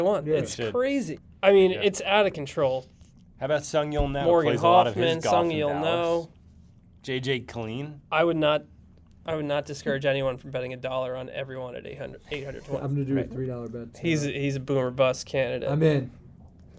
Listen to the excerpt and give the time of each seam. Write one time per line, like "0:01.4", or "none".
0:01.2
0:12.8